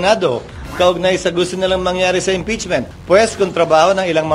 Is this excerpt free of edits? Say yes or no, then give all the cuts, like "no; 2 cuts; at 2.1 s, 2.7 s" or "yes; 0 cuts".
no; 1 cut; at 2.9 s